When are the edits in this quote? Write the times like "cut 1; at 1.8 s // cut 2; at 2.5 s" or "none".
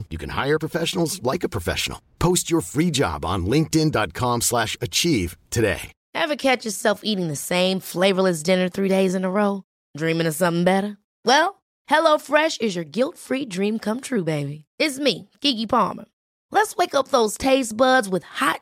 cut 1; at 5.9 s